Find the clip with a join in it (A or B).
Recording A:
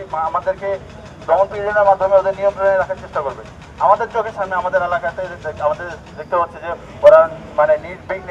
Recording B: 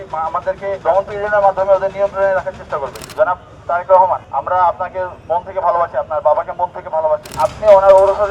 B